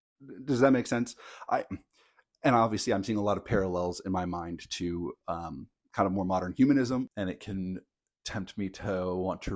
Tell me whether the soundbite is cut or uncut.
cut